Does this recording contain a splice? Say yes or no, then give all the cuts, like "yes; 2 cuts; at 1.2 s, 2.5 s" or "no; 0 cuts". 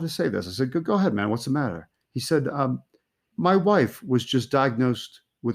yes; 1 cut; at 3.3 s